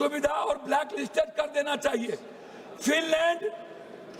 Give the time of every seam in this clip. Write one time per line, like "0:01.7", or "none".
none